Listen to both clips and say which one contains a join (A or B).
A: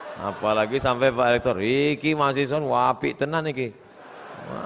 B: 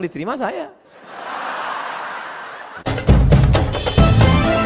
B